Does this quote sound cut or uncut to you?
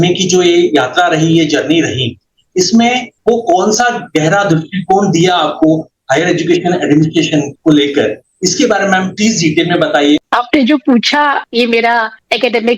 cut